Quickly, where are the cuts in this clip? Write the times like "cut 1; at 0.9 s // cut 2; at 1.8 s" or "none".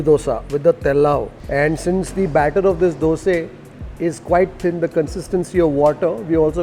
cut 1; at 1.3 s